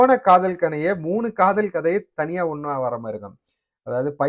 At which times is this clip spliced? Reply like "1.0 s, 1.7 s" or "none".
none